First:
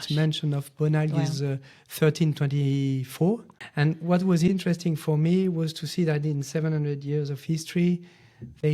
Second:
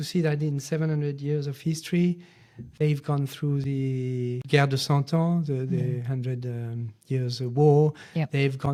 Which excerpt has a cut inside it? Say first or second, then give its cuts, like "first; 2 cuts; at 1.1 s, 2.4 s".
first; 1 cut; at 3.6 s